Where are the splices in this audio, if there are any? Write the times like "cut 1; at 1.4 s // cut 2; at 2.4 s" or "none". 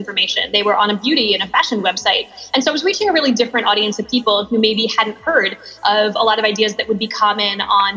none